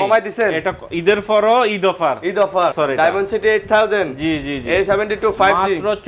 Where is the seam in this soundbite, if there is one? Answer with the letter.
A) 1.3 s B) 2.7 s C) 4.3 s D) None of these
B